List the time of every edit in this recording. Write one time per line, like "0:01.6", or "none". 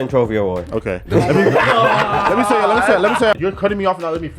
0:03.3